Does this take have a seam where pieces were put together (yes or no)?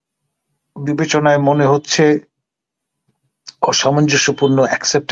no